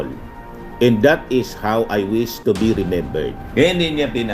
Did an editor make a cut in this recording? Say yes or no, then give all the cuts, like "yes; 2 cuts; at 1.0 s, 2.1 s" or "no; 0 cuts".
yes; 1 cut; at 3.4 s